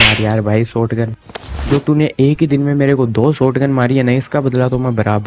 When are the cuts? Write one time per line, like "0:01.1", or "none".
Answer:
none